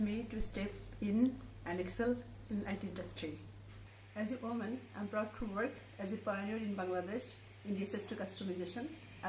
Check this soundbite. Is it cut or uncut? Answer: uncut